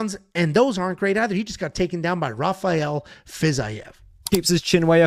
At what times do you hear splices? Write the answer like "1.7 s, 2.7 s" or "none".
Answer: 4.1 s